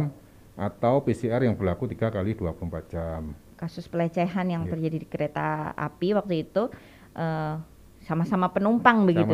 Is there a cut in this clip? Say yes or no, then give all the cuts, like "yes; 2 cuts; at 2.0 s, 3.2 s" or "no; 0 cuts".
yes; 1 cut; at 3.4 s